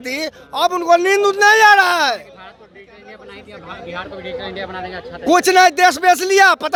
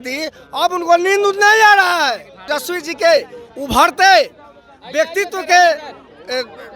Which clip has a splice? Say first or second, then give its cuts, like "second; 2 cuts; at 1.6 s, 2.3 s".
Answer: second; 1 cut; at 2.5 s